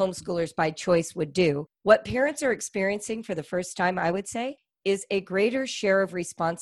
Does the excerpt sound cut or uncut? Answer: cut